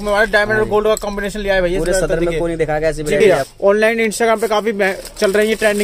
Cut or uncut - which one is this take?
cut